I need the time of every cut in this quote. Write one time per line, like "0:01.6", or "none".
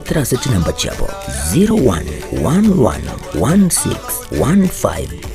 0:01.7